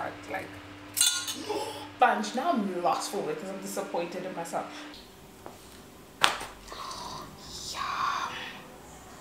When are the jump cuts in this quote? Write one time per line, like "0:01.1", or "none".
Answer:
0:01.9
0:04.9